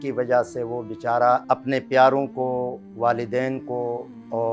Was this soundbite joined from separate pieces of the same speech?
yes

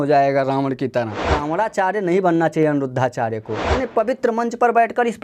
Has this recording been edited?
yes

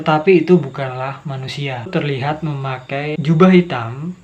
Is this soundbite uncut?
no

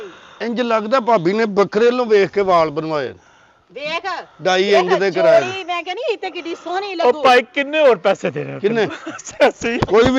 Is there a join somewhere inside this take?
no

